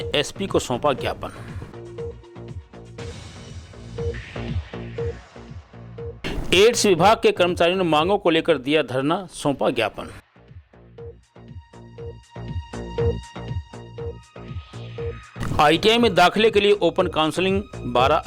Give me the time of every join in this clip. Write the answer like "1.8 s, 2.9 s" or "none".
15.3 s